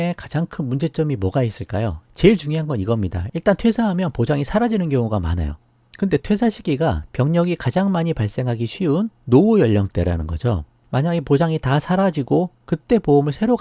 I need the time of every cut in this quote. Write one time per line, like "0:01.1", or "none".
0:02.0
0:06.2
0:10.7